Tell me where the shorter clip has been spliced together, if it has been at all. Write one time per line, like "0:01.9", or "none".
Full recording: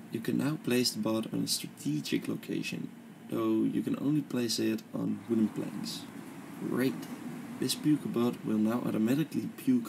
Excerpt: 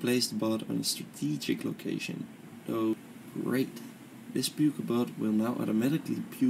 0:02.9

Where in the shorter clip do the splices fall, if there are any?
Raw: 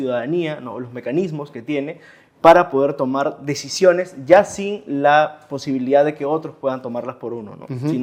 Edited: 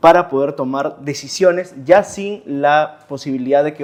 none

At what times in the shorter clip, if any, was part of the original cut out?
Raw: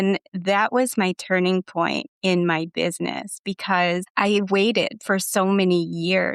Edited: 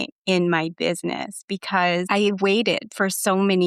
0:02.1

